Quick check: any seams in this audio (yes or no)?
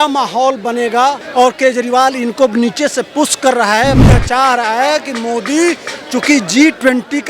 yes